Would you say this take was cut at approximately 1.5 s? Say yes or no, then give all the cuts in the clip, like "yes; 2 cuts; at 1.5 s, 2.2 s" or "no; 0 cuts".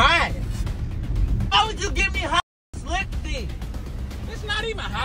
yes; 1 cut; at 1.5 s